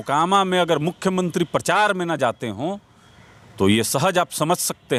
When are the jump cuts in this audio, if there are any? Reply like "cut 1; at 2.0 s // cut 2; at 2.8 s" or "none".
none